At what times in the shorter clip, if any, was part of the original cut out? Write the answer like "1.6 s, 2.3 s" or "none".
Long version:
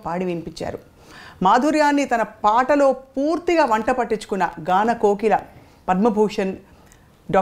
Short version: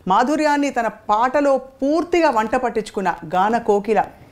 none